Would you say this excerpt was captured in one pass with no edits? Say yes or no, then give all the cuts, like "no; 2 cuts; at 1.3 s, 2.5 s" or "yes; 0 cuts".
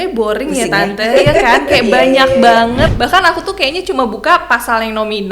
no; 1 cut; at 2.9 s